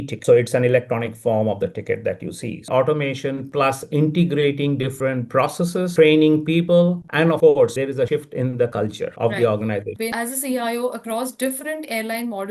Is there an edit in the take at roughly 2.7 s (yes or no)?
yes